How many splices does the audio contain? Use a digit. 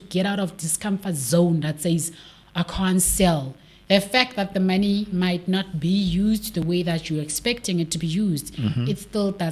1